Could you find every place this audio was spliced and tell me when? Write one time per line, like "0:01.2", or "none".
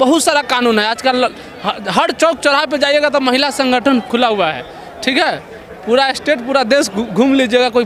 none